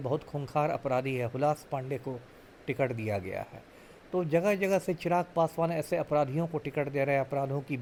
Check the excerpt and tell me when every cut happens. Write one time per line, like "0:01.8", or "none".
none